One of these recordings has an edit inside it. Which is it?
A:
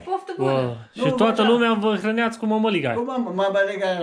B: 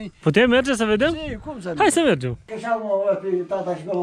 B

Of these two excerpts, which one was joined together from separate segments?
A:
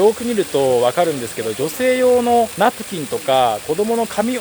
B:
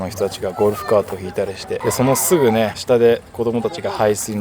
B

